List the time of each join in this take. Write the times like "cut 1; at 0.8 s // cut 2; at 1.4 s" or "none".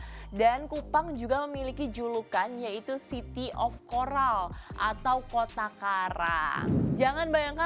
cut 1; at 6.7 s